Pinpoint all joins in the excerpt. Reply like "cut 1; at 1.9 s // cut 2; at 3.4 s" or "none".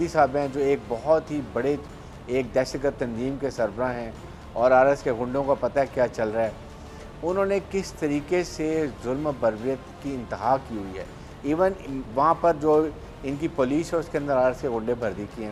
none